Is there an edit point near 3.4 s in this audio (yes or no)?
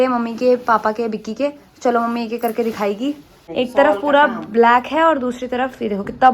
yes